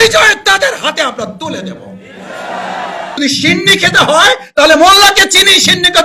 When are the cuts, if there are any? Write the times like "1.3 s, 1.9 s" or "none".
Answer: 3.2 s